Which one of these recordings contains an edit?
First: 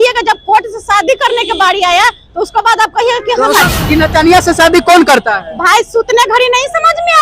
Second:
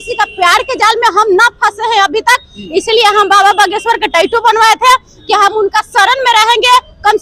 first; 1 cut; at 3.6 s

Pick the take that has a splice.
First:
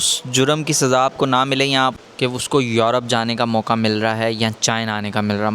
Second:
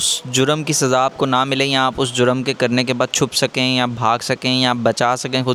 first; 1 cut; at 1.9 s

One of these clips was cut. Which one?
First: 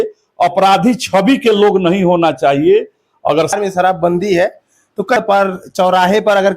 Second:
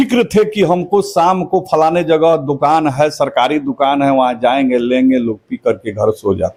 first; 2 cuts; at 3.5 s, 5.2 s

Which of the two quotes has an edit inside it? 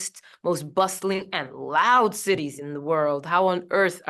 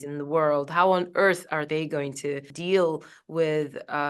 second; 1 cut; at 2.5 s

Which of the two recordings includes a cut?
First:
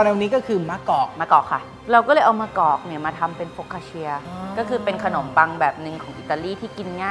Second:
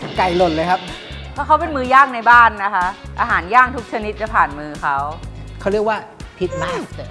first; 2 cuts; at 1.6 s, 4.3 s

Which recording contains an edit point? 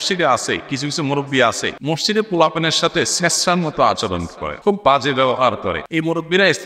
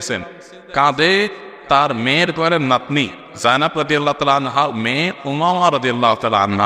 first; 3 cuts; at 1.7 s, 4.4 s, 5.8 s

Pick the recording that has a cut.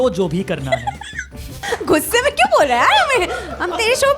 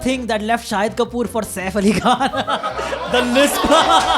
first; 1 cut; at 1.6 s

